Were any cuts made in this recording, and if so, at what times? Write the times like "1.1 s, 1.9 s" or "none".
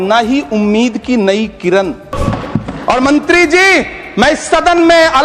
2.1 s